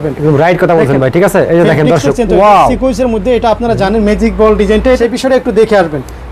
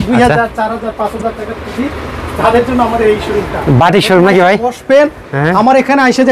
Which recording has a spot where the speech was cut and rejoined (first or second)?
first